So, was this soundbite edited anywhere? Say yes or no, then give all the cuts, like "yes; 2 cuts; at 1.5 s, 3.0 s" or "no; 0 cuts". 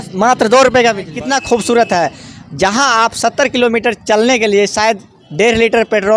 yes; 1 cut; at 1.2 s